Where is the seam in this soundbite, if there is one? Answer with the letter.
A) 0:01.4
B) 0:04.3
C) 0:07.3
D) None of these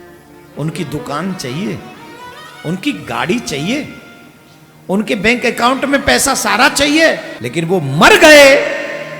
C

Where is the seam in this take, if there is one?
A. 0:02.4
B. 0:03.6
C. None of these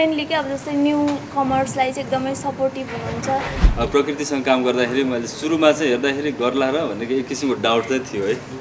B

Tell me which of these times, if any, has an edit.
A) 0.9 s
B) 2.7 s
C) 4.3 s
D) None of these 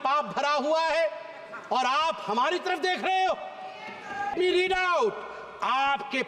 C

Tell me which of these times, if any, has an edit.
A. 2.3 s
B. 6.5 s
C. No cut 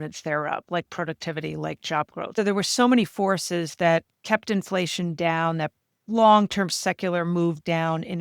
A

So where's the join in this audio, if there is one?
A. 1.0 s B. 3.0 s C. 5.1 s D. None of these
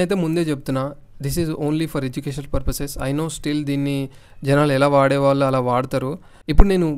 D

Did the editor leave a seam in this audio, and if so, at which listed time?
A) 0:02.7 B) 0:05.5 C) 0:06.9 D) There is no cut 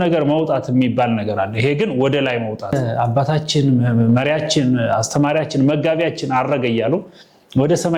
A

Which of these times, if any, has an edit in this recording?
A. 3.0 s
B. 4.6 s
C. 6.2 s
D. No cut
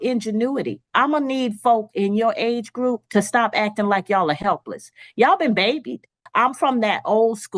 C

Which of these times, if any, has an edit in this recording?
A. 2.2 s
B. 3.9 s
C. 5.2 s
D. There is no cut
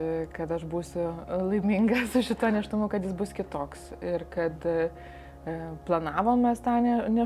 D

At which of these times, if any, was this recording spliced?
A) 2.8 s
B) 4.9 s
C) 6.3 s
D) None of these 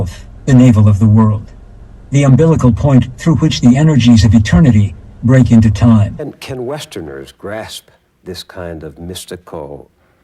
C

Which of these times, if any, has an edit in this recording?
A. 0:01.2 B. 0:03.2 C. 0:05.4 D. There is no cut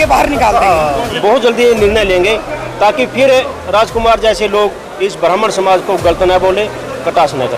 A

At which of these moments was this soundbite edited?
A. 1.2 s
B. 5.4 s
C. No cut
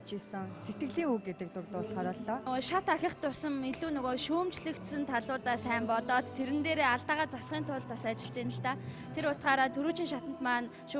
C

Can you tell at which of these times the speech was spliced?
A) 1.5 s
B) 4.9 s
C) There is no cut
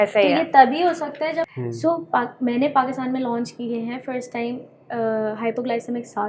A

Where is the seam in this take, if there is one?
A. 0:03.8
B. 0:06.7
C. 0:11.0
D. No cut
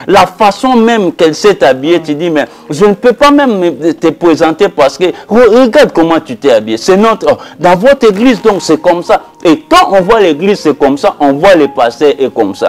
D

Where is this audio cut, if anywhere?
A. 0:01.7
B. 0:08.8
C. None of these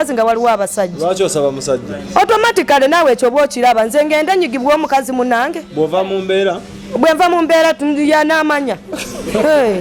C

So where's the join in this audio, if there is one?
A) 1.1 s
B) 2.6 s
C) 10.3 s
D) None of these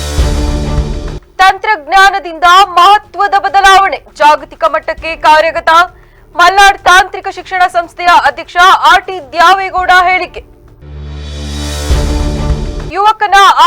A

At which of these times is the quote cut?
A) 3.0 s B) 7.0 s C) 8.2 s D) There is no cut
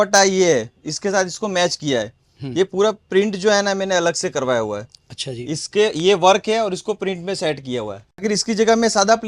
C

